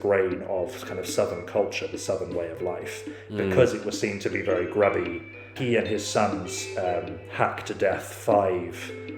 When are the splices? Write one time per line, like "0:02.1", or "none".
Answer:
0:05.5